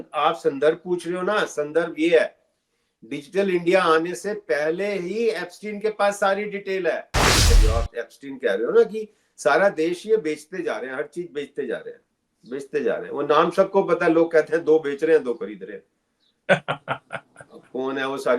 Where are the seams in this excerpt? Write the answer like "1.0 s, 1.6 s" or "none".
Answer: 7.5 s

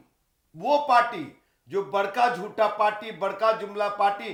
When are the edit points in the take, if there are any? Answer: none

